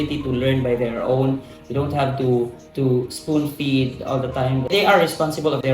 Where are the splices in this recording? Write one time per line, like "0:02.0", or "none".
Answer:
0:04.7